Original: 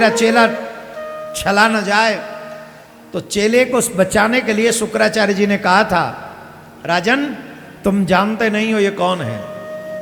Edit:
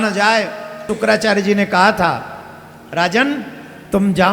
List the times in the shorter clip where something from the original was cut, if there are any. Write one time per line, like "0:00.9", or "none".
0:00.9